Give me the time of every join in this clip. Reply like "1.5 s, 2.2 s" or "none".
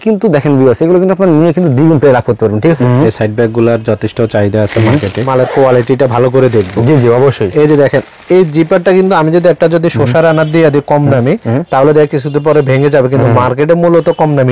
2.8 s, 5.3 s